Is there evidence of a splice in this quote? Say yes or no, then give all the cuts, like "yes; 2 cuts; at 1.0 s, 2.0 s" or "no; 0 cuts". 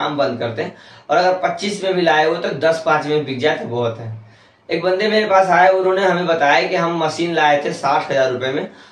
no; 0 cuts